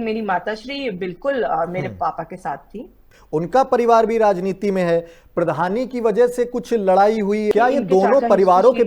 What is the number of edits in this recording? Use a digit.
2